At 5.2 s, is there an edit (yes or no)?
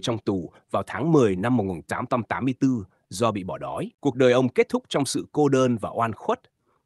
no